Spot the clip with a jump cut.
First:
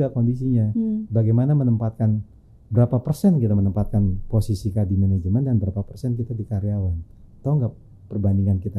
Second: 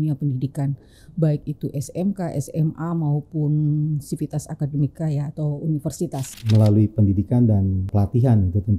second; 2 cuts; at 6.3 s, 7.9 s

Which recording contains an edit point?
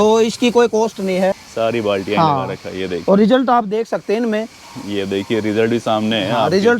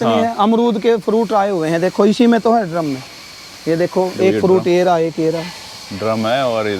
first; 1 cut; at 1.4 s

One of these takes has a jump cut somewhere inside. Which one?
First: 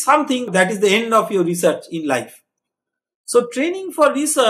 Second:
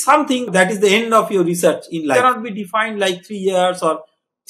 second; 1 cut; at 2.2 s

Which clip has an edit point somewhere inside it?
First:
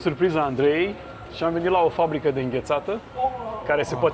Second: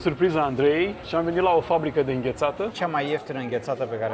second; 2 cuts; at 1.0 s, 2.8 s

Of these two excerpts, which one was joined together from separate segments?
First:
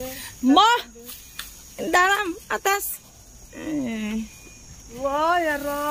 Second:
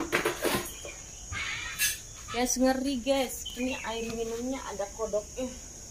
second; 1 cut; at 2.3 s

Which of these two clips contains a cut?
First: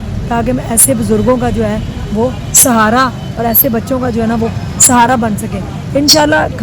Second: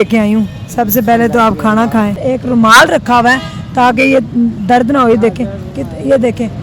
second; 1 cut; at 2.2 s

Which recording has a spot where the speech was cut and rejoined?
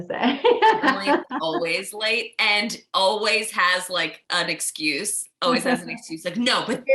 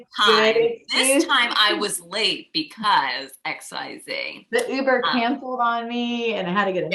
first; 1 cut; at 4.2 s

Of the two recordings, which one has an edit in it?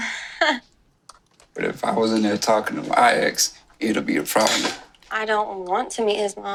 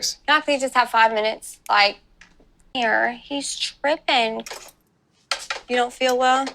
second; 1 cut; at 2.7 s

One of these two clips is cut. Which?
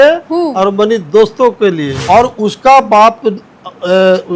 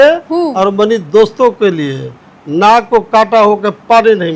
first; 1 cut; at 1.9 s

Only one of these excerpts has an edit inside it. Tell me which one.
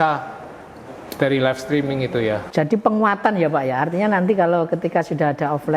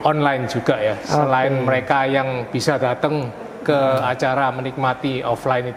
first; 1 cut; at 2.4 s

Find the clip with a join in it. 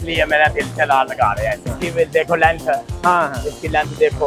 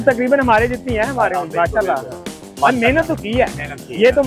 first; 1 cut; at 1.7 s

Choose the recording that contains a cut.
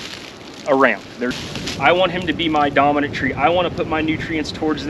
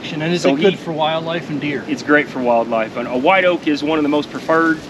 first; 1 cut; at 1.4 s

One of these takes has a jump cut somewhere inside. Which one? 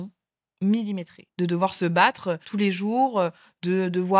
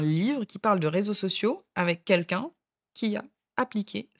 first; 2 cuts; at 1.2 s, 2.4 s

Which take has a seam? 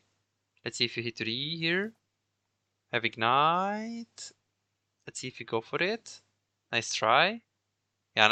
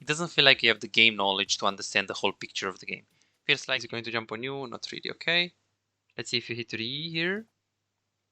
second; 1 cut; at 3.6 s

